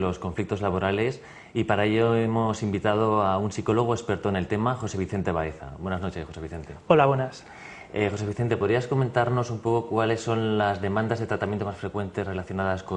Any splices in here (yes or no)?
no